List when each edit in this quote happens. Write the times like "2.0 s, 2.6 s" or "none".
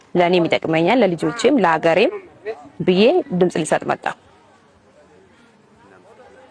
4.8 s